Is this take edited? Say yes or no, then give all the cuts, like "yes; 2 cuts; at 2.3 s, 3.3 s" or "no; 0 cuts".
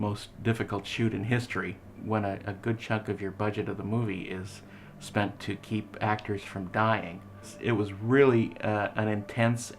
yes; 2 cuts; at 2.0 s, 7.5 s